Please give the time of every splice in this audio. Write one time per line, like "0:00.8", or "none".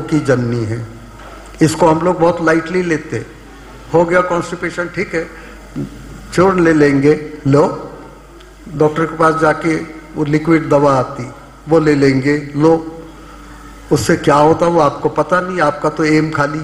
none